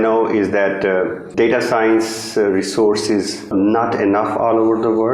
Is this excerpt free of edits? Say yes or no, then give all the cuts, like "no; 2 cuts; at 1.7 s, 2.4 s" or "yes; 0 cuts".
no; 2 cuts; at 1.3 s, 3.5 s